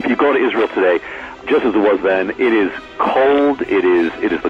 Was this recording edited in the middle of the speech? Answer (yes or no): yes